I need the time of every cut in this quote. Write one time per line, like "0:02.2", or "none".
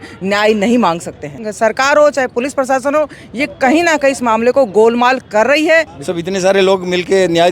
0:01.4
0:06.0